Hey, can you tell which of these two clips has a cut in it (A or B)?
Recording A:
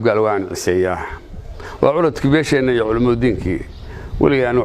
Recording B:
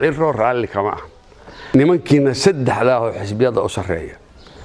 B